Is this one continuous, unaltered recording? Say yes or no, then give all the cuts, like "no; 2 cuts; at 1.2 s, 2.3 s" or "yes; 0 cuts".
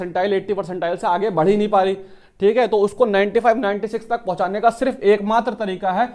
yes; 0 cuts